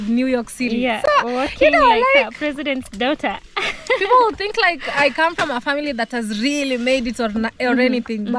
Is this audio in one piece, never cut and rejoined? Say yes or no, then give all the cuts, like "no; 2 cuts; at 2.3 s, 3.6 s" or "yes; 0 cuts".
yes; 0 cuts